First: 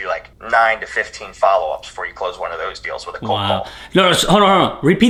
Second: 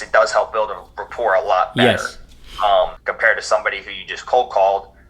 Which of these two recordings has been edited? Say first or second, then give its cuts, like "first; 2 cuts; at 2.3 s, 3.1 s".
second; 1 cut; at 3.0 s